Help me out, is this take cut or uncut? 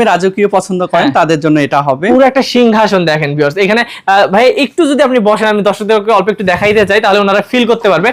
uncut